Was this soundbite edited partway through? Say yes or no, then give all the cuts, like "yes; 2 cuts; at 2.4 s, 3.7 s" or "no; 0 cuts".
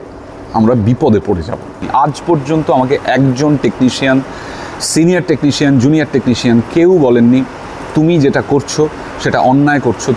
yes; 1 cut; at 1.8 s